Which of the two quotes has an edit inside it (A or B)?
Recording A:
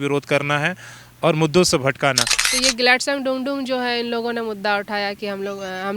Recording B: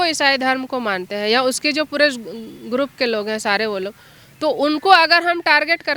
A